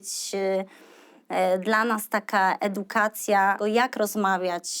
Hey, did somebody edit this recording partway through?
yes; 1 cut; at 3.6 s

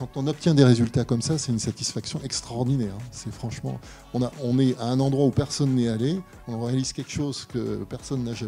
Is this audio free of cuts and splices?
yes; 0 cuts

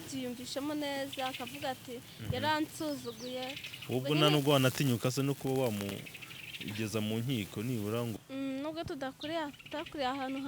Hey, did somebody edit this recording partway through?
yes; 1 cut; at 8.1 s

